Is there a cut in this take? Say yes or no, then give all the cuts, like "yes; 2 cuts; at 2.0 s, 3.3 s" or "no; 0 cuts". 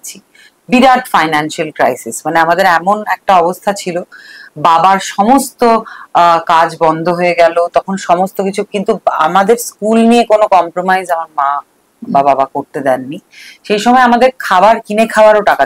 no; 0 cuts